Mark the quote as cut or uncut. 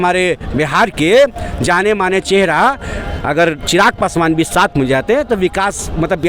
uncut